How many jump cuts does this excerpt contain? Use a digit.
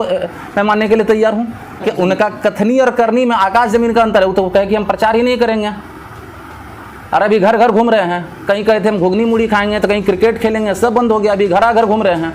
1